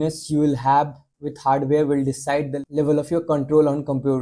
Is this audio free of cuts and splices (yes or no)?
yes